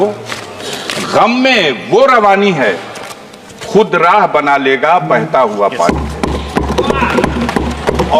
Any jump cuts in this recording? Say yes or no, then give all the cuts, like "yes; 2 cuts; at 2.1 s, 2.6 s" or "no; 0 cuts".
no; 0 cuts